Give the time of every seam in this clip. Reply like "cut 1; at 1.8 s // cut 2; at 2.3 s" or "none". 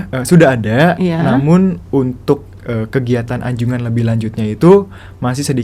none